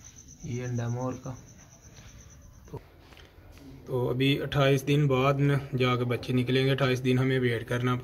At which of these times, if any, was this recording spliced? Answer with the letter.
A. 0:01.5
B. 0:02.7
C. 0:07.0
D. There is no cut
B